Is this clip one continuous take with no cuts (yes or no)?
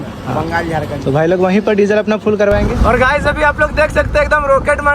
no